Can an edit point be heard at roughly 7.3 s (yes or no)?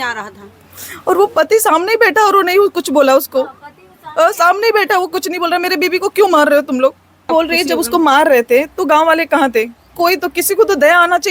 yes